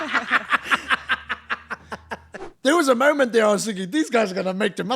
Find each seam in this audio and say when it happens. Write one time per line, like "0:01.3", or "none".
0:02.4